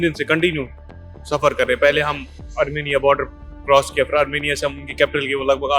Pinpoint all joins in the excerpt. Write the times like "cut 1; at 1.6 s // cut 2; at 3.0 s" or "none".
cut 1; at 2.4 s